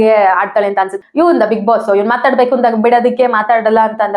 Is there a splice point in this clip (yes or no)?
yes